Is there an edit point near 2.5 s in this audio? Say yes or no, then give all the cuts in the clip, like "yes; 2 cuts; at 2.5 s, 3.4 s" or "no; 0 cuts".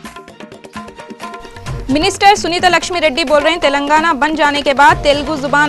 no; 1 cut; at 1.0 s